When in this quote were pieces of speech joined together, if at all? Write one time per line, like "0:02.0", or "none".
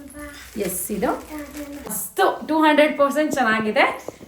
0:01.9